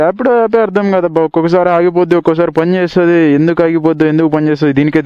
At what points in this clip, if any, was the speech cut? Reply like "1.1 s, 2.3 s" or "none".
none